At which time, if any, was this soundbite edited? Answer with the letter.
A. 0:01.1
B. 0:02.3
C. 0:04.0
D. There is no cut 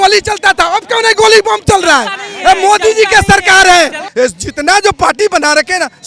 C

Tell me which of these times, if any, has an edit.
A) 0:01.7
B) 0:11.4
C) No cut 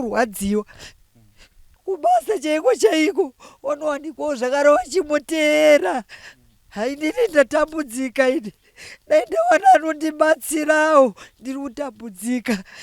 A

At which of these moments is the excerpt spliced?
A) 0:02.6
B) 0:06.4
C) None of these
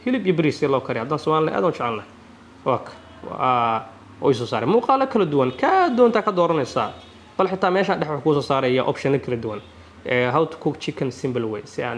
C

